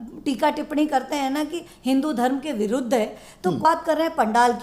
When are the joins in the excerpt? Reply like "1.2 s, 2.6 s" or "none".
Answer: 3.6 s